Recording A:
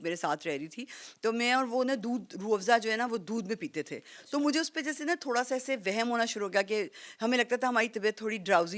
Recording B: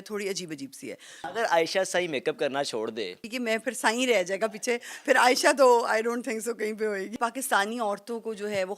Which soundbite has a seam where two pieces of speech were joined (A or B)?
B